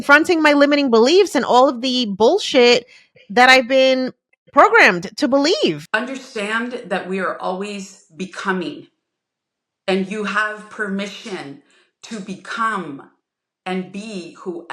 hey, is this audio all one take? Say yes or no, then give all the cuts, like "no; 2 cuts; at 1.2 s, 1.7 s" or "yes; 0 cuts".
no; 1 cut; at 5.8 s